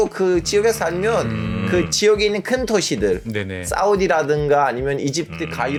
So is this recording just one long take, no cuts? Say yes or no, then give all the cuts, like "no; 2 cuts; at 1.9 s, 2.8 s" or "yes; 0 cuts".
yes; 0 cuts